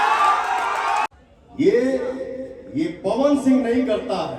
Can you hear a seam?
yes; 1 cut; at 1.1 s

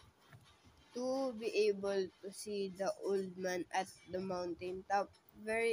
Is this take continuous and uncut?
yes; 0 cuts

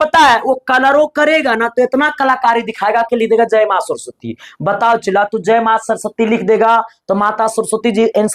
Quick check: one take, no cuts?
yes; 0 cuts

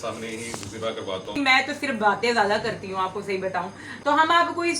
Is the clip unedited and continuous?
no; 2 cuts; at 1.3 s, 3.9 s

